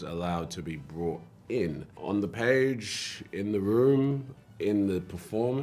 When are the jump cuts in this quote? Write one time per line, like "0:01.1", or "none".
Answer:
0:01.9